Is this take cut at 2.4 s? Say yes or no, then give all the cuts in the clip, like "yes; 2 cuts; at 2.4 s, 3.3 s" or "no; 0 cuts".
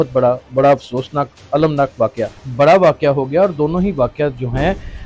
yes; 1 cut; at 2.4 s